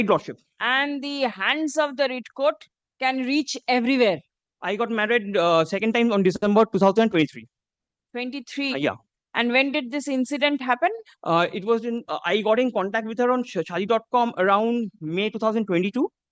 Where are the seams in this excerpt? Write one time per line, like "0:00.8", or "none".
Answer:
0:04.3